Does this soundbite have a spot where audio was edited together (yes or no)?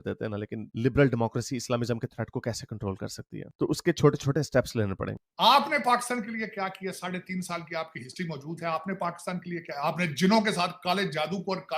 yes